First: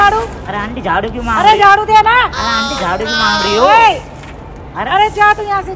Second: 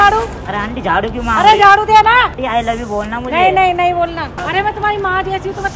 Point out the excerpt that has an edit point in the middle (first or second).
second